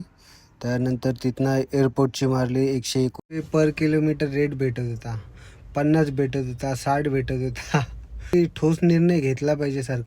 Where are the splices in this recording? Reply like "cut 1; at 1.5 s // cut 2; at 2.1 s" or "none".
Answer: cut 1; at 3.3 s // cut 2; at 8.3 s